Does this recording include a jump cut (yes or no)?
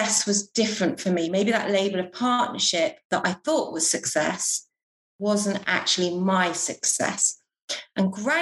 no